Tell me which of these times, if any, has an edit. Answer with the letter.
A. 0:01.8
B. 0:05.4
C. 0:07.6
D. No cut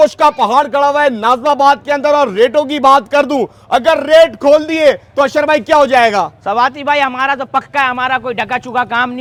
D